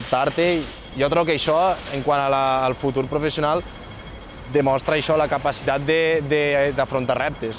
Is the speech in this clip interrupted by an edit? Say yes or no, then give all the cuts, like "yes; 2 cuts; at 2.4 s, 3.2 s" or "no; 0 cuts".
no; 0 cuts